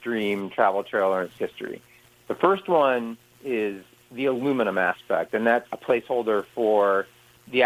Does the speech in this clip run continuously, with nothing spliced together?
yes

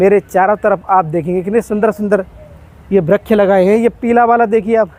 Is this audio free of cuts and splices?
yes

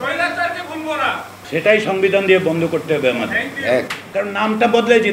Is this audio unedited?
no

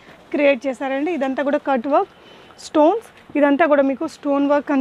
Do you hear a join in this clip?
no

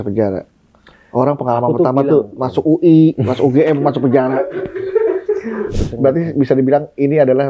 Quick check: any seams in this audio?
yes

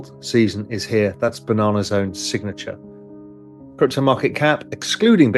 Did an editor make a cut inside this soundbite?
no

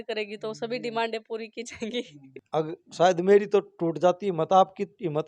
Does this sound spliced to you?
yes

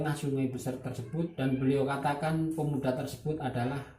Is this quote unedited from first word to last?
no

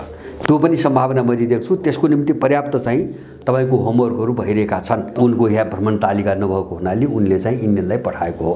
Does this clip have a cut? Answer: yes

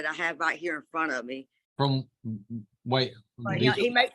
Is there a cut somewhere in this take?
yes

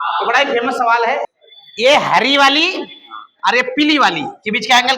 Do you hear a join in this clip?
yes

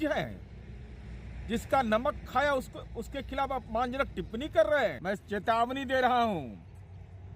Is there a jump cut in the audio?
yes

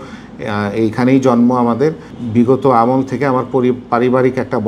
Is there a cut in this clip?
yes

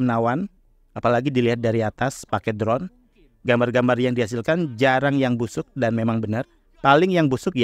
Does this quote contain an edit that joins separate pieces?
no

